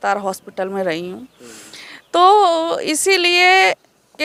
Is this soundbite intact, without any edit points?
yes; 0 cuts

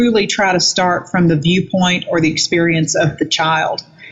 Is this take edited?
no; 0 cuts

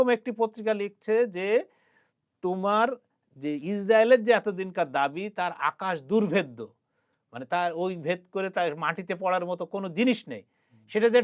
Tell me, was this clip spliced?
no; 0 cuts

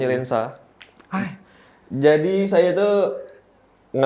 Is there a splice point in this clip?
no; 0 cuts

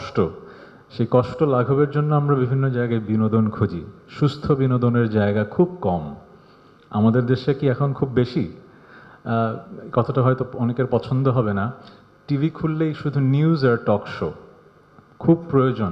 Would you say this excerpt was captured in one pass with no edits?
yes; 0 cuts

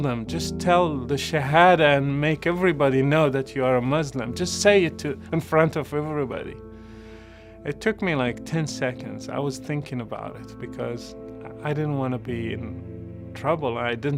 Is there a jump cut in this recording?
no; 0 cuts

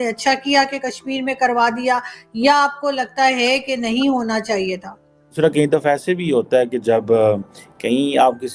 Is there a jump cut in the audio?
yes; 1 cut; at 5.4 s

